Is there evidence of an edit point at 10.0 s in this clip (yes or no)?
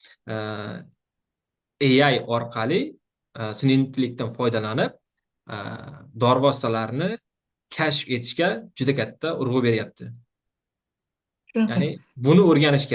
no